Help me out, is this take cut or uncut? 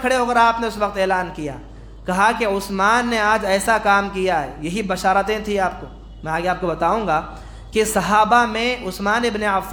uncut